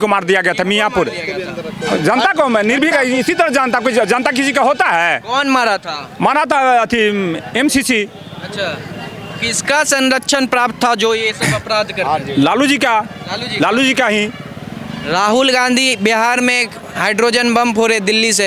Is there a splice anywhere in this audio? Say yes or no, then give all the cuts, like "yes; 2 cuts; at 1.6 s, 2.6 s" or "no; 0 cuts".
no; 0 cuts